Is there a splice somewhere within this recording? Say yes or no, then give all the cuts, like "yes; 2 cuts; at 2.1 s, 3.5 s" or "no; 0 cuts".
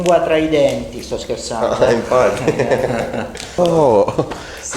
yes; 1 cut; at 3.5 s